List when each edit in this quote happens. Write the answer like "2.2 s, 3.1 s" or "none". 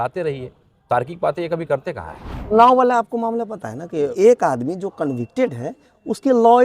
2.5 s, 4.1 s